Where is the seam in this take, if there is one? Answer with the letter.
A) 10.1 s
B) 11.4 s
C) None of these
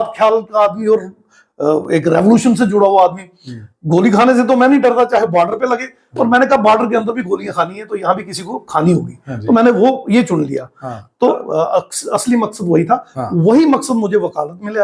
B